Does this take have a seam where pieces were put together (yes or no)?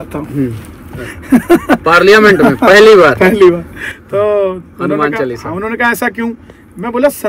no